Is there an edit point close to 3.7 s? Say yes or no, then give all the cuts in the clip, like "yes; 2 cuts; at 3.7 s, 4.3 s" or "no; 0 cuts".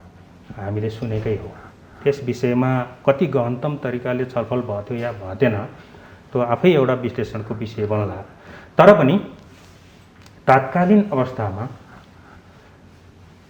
no; 0 cuts